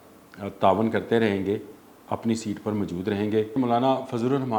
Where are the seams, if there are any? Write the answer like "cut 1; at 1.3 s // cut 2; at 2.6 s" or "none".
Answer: cut 1; at 3.5 s